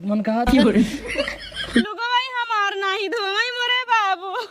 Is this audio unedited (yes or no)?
no